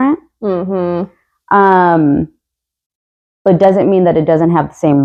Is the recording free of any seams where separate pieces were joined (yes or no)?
yes